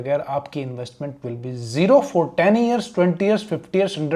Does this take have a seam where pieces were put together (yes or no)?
no